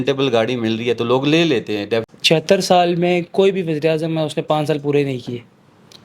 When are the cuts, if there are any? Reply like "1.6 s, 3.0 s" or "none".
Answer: 2.1 s